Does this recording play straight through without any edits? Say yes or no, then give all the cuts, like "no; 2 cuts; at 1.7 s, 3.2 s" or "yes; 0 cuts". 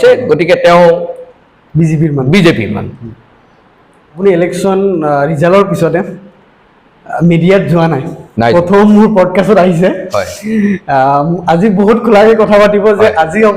no; 1 cut; at 4.2 s